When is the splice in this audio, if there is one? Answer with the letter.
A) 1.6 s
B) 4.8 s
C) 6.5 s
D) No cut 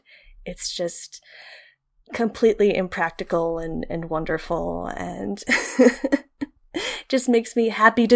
C